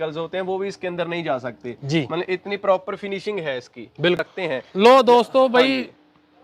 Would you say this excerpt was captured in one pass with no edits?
no; 1 cut; at 4.2 s

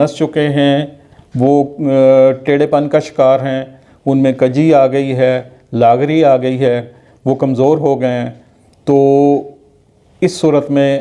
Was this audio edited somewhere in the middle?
no; 0 cuts

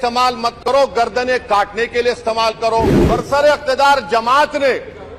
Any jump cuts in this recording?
yes; 1 cut; at 3.0 s

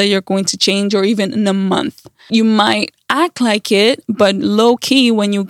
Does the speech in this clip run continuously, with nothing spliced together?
no; 1 cut; at 2.2 s

